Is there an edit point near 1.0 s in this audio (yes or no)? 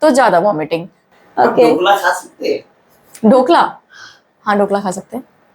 yes